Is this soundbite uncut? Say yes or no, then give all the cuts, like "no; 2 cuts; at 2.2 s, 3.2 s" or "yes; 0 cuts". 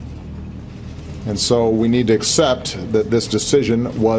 yes; 0 cuts